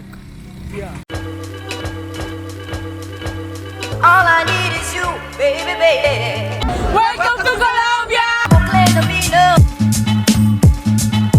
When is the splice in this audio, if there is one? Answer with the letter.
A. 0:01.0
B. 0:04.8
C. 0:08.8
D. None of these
A